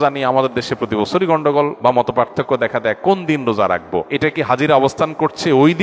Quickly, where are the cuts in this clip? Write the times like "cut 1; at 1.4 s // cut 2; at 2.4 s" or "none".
cut 1; at 1.7 s // cut 2; at 3.8 s